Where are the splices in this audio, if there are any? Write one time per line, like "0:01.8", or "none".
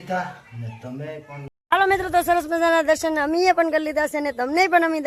0:01.6